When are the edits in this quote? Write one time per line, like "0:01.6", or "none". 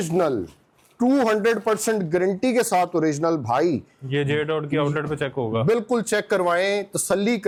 none